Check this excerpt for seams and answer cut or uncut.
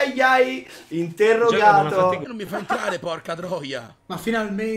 uncut